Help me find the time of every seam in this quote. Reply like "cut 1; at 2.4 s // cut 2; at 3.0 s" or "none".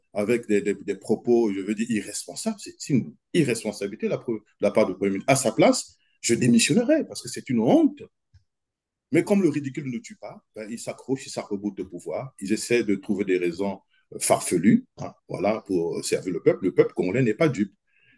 none